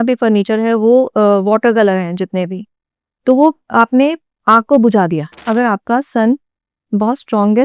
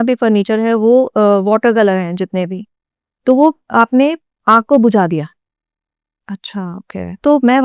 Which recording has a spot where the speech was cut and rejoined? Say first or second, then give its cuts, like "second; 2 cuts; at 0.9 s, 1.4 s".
first; 1 cut; at 5.4 s